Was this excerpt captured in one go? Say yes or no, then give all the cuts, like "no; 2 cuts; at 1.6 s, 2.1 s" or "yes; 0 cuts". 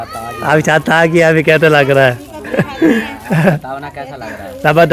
yes; 0 cuts